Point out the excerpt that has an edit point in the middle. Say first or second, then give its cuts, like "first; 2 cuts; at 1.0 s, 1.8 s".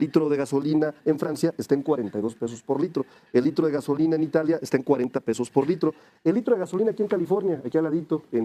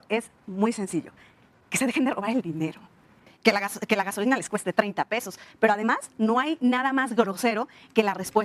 second; 1 cut; at 3.3 s